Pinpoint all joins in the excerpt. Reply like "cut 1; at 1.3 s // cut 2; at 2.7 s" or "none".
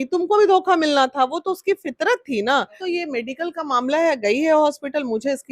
cut 1; at 2.8 s